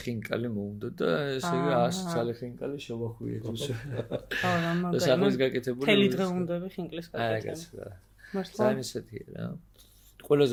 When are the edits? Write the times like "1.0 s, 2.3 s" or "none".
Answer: none